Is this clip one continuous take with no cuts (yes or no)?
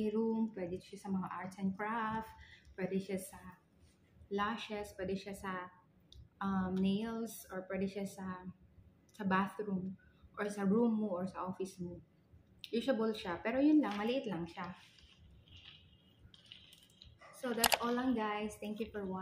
yes